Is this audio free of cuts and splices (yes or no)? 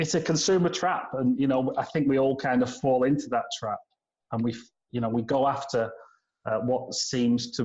yes